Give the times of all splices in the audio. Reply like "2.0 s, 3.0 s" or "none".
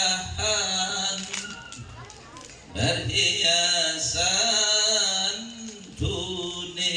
none